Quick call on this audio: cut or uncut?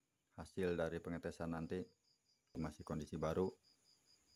cut